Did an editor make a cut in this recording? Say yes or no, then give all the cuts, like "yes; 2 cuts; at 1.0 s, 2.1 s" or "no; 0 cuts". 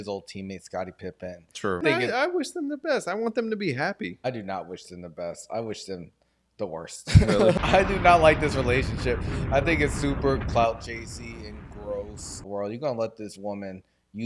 yes; 4 cuts; at 1.8 s, 4.2 s, 7.5 s, 12.3 s